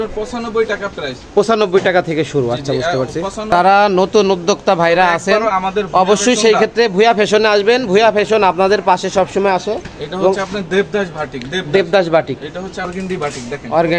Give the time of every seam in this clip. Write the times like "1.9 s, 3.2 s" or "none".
3.5 s, 12.9 s